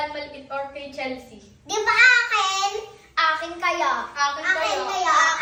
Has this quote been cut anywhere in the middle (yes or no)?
no